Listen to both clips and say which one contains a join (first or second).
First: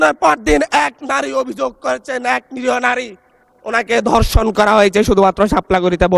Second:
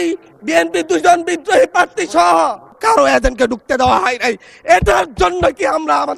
second